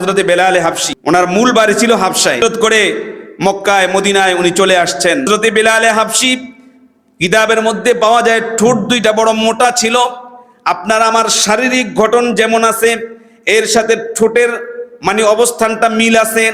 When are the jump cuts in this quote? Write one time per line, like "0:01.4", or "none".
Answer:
0:00.9
0:02.4
0:05.2